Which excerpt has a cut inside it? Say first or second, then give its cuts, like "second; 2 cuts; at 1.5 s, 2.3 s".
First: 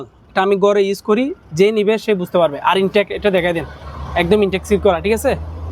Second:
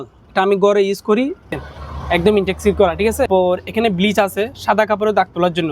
second; 2 cuts; at 1.5 s, 3.3 s